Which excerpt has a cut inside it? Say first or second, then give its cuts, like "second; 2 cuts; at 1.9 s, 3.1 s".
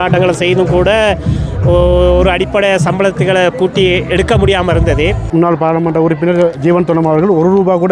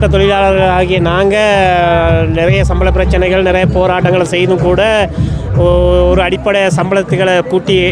first; 1 cut; at 5.2 s